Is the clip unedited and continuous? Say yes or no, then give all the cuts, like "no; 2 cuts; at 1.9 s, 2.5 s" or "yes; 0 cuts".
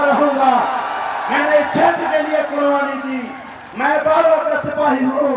yes; 0 cuts